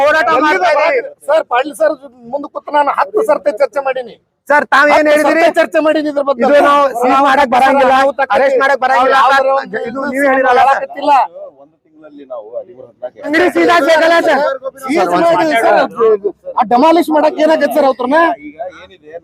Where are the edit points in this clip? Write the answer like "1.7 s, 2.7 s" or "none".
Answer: 13.3 s